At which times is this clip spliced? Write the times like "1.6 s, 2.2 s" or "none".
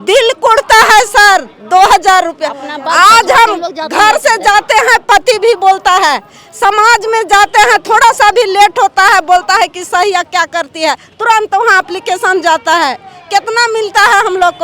none

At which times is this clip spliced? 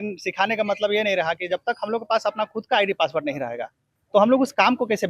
none

